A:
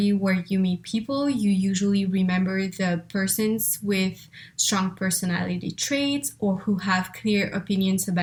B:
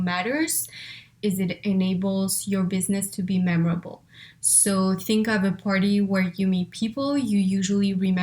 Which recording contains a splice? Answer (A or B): B